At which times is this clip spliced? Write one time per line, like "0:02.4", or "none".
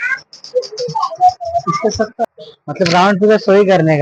0:02.5